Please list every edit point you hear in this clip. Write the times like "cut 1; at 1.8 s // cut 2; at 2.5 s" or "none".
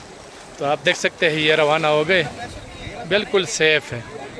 none